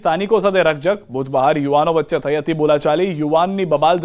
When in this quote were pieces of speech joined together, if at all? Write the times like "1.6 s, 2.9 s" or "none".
1.5 s

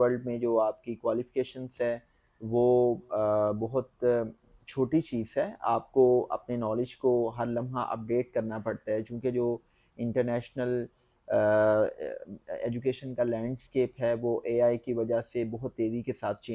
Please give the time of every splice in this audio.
none

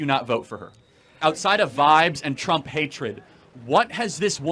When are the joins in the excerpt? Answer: 1.2 s

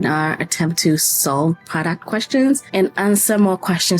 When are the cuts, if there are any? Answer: 1.7 s, 2.7 s

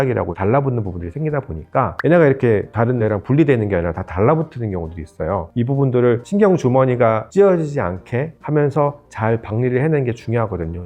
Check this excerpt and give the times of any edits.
1.0 s, 1.9 s, 3.0 s, 5.5 s, 6.2 s, 7.2 s, 8.4 s

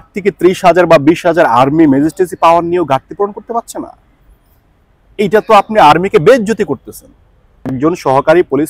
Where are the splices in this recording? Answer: 7.8 s

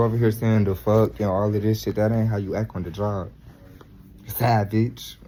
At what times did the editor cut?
none

